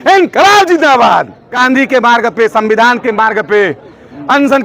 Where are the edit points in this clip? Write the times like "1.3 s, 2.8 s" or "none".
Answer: 1.4 s